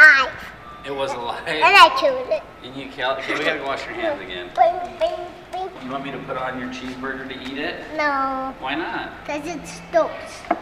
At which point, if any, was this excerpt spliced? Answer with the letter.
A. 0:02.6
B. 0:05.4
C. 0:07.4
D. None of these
D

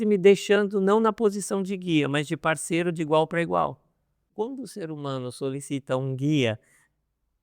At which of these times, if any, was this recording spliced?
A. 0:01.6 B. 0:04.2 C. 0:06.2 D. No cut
B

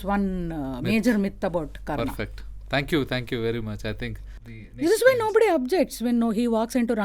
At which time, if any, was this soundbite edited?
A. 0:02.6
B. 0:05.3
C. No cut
C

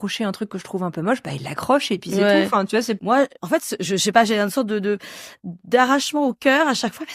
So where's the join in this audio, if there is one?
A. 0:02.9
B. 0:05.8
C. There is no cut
A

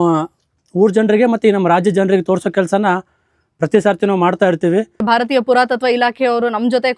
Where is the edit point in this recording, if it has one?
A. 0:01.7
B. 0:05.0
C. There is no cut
B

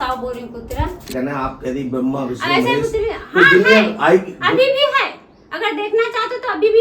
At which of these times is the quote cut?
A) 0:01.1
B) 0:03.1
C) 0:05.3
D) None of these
A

